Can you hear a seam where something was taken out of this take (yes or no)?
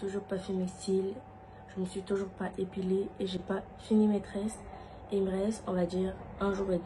no